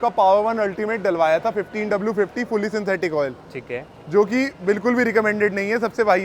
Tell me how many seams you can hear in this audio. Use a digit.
0